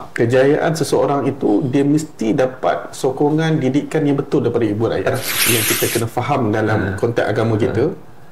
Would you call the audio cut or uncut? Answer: cut